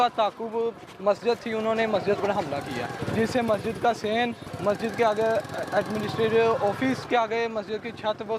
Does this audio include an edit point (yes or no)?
yes